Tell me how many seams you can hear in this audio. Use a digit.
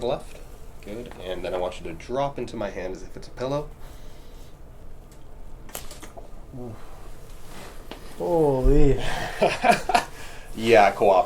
0